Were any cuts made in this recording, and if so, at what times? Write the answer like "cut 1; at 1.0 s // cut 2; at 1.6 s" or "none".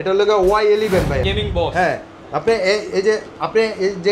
cut 1; at 1.3 s